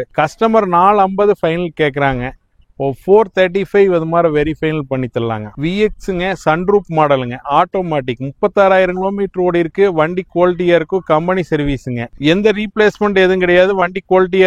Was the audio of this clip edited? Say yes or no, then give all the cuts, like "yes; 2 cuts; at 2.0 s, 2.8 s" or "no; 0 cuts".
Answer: yes; 2 cuts; at 5.5 s, 12.1 s